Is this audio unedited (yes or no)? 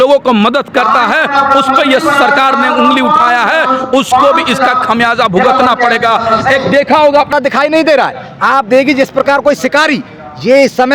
no